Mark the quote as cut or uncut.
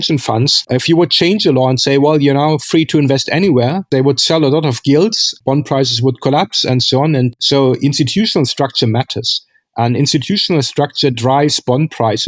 cut